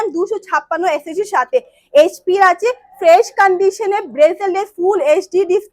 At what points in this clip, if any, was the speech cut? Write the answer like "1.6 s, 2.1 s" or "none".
none